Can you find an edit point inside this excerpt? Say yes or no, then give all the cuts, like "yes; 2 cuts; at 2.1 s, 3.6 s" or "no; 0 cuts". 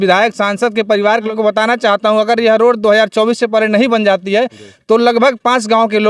yes; 1 cut; at 1.3 s